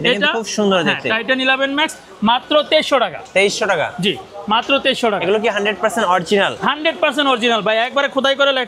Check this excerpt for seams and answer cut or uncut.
uncut